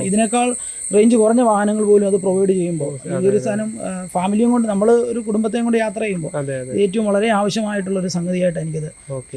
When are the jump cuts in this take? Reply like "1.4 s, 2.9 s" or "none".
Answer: none